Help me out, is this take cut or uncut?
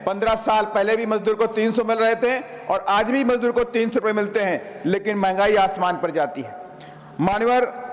uncut